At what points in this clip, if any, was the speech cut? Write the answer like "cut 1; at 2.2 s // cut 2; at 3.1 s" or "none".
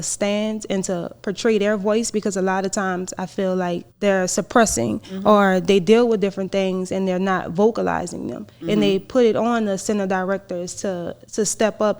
cut 1; at 3.9 s